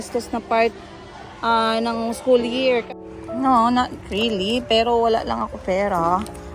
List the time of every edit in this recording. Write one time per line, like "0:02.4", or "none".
0:02.9

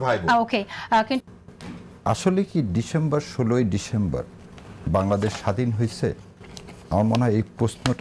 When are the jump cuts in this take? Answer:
0:01.2

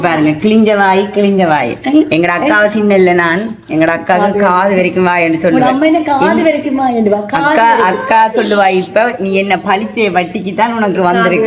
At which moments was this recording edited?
none

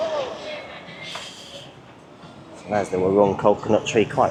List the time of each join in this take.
none

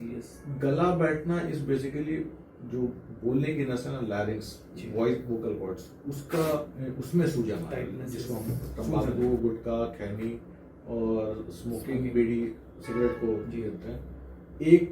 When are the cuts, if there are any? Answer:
0:09.2

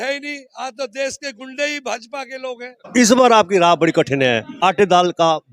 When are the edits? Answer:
0:02.8
0:04.6

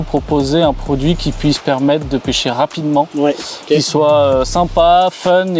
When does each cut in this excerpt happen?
none

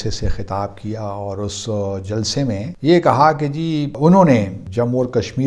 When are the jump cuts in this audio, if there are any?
0:02.7
0:03.9
0:04.6

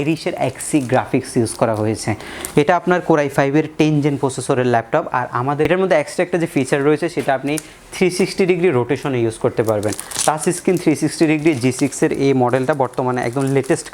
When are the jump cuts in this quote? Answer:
0:05.7

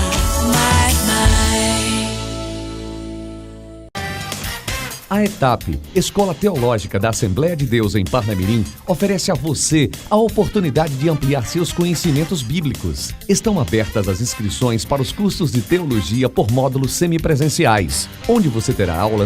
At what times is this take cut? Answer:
0:03.8

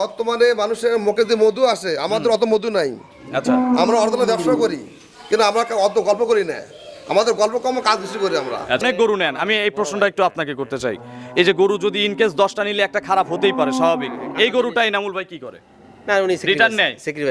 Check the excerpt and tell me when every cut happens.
0:08.8

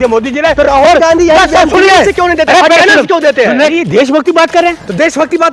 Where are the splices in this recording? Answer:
0:03.7

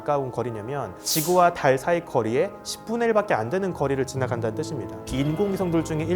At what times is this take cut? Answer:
0:01.0
0:05.0

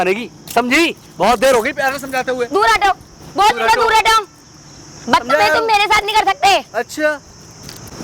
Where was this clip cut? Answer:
none

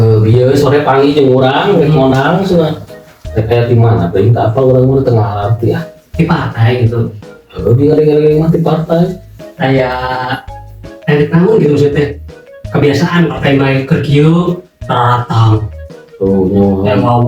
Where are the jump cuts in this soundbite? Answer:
none

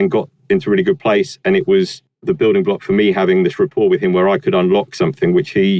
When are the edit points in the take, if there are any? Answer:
0:02.1

